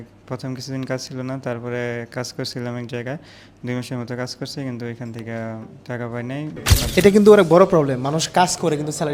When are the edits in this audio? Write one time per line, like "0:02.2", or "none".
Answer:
0:06.7